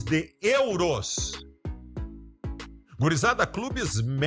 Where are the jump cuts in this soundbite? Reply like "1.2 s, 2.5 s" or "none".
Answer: 1.1 s, 2.8 s